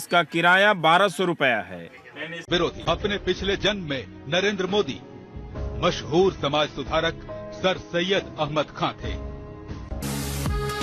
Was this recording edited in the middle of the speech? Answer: yes; 1 cut; at 2.3 s

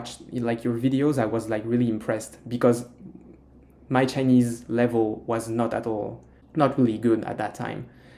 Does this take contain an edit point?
no; 0 cuts

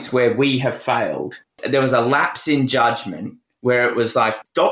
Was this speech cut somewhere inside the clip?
yes; 1 cut; at 1.6 s

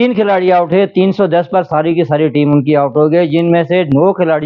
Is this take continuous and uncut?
yes; 0 cuts

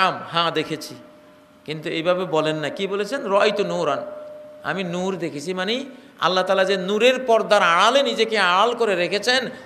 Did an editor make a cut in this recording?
no; 0 cuts

